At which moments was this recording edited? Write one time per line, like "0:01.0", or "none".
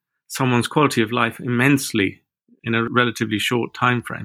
0:02.8

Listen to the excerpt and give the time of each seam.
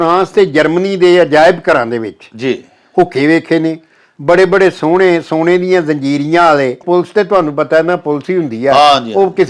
0:06.8

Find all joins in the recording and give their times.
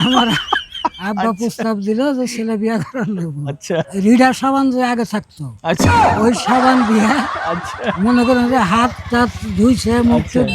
0:03.9

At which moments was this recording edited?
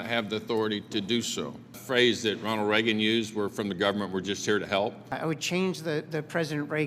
0:01.8
0:05.1

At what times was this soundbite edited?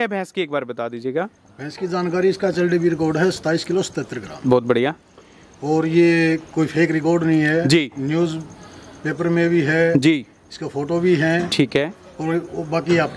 none

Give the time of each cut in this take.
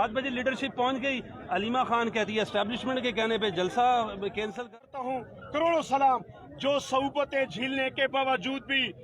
0:04.8

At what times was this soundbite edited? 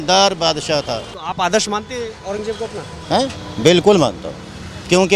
0:01.1

